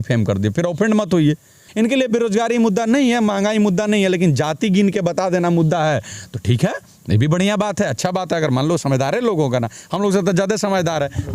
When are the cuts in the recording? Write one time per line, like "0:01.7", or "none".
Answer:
0:01.6